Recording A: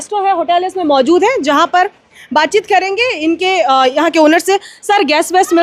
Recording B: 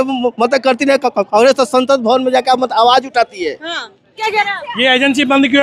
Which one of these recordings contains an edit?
B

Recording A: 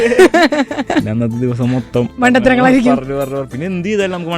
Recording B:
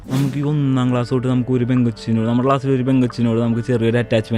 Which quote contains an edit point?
A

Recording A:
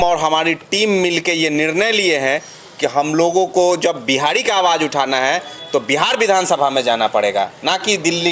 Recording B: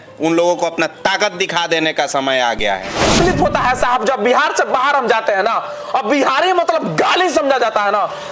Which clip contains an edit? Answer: B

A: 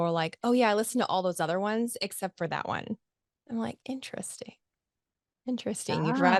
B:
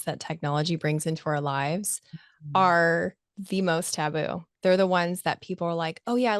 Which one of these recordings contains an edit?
B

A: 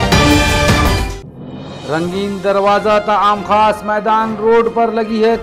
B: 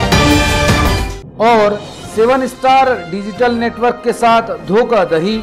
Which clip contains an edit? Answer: A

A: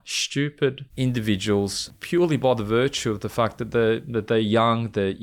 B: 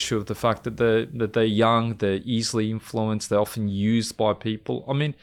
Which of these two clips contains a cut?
A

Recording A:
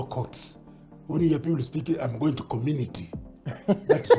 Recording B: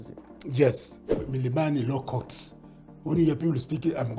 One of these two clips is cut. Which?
B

